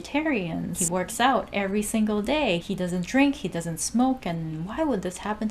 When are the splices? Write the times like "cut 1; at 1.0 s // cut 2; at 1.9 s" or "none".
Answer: cut 1; at 0.8 s // cut 2; at 2.6 s